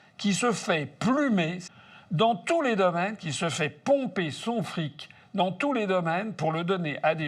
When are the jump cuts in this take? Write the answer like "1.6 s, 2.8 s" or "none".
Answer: 1.7 s